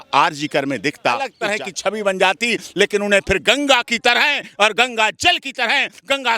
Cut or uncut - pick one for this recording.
cut